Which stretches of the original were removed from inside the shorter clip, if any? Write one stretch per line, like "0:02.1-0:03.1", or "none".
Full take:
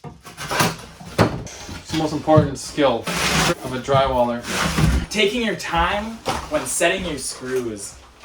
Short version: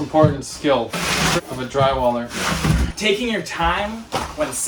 none